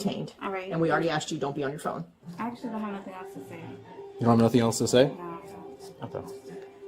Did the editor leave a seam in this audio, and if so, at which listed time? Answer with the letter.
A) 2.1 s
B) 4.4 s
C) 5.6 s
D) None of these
A